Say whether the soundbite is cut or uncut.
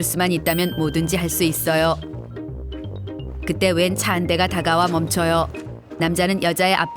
uncut